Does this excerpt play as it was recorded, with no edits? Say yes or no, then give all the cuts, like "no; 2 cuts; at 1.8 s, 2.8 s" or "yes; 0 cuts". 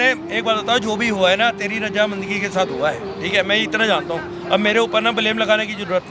yes; 0 cuts